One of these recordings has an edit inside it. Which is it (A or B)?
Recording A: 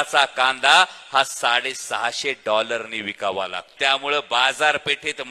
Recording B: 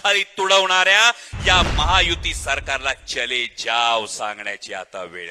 A